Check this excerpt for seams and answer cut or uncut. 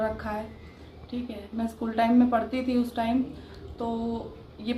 uncut